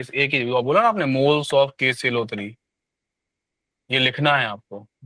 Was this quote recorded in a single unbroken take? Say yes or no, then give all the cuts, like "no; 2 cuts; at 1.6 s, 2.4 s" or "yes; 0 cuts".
yes; 0 cuts